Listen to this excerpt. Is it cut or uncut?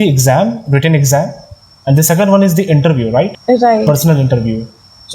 cut